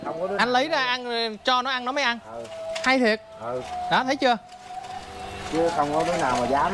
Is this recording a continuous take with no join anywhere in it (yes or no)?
yes